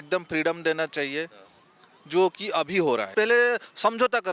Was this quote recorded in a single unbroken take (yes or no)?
no